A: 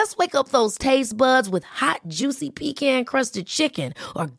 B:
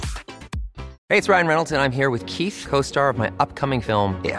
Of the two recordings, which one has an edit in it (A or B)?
B